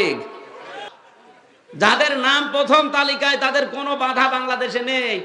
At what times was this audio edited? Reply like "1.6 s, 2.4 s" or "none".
0.9 s